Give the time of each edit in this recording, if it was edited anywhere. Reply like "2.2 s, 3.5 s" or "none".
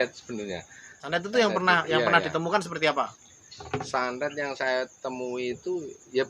1.0 s